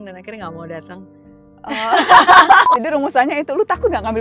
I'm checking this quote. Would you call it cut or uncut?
cut